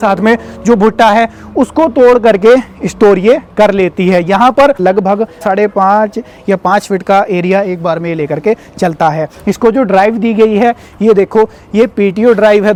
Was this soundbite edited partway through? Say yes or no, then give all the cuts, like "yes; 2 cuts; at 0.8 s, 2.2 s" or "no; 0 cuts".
no; 0 cuts